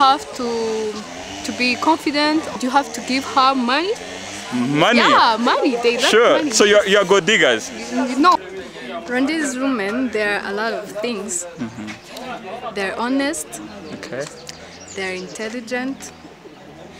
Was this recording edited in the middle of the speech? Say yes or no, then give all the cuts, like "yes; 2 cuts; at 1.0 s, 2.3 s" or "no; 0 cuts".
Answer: yes; 2 cuts; at 2.5 s, 8.4 s